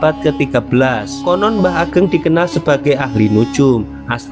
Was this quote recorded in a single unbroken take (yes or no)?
no